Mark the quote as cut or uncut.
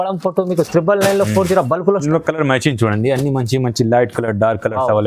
cut